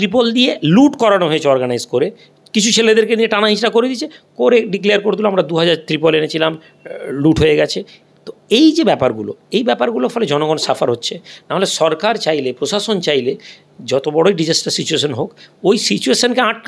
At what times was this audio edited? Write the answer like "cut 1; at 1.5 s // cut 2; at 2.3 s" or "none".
none